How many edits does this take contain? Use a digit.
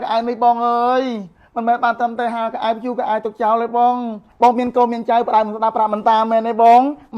1